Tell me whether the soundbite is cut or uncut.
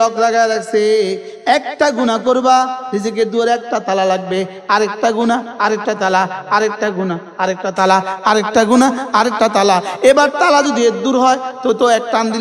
uncut